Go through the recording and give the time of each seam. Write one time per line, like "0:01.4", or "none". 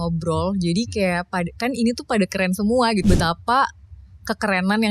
0:03.0